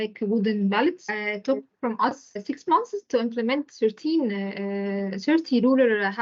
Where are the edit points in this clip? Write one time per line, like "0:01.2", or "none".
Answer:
0:01.1
0:02.3